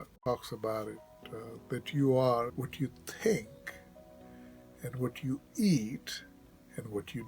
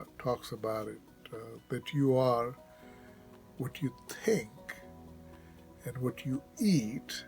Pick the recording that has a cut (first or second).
first